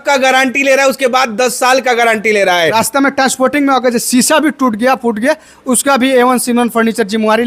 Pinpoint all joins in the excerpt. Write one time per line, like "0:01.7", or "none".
0:02.7